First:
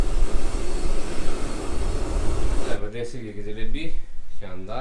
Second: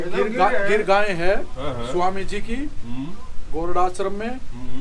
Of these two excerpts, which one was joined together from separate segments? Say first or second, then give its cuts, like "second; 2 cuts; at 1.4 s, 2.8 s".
first; 1 cut; at 2.7 s